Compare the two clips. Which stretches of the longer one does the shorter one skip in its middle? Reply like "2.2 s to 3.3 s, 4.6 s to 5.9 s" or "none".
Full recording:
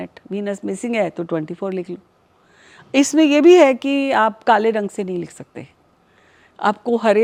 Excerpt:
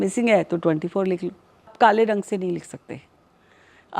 2.4 s to 4.4 s